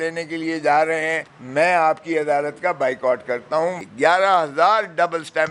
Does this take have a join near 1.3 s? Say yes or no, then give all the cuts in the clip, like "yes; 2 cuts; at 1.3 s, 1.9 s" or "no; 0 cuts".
no; 1 cut; at 3.8 s